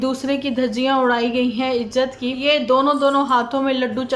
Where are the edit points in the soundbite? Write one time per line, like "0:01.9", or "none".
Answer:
0:02.4